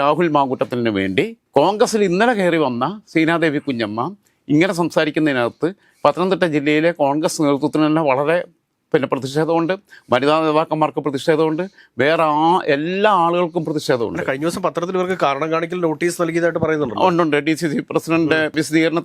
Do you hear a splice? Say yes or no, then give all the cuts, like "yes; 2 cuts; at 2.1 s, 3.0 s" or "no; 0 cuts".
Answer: no; 0 cuts